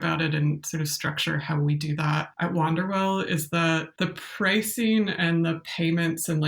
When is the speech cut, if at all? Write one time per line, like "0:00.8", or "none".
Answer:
0:02.3
0:03.9